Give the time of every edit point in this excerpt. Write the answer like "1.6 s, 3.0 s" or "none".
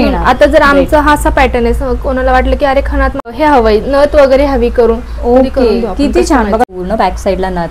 3.3 s, 6.7 s